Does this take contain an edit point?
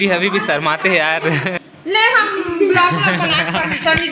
yes; 1 cut; at 1.6 s

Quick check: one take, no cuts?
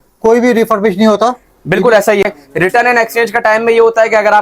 no; 1 cut; at 2.2 s

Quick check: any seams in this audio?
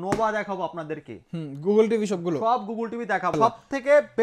yes; 1 cut; at 3.3 s

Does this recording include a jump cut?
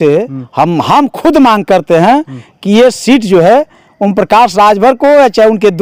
no; 0 cuts

